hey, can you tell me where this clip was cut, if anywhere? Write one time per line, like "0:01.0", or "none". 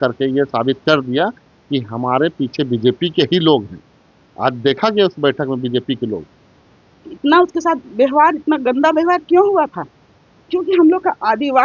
0:06.3